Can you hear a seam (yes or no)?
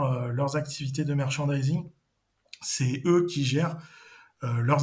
no